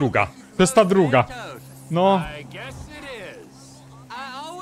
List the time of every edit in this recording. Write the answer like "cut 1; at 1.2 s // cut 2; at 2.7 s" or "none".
none